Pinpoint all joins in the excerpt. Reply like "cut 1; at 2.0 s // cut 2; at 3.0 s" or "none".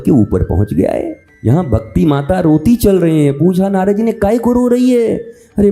cut 1; at 1.2 s